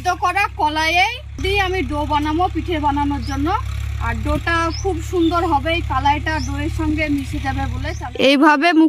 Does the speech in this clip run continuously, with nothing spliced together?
no; 2 cuts; at 1.4 s, 7.9 s

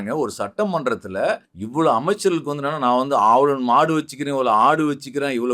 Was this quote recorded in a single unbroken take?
no; 1 cut; at 1.5 s

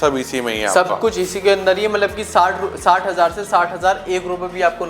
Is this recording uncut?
yes; 0 cuts

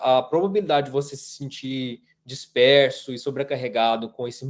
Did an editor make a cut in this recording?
no; 0 cuts

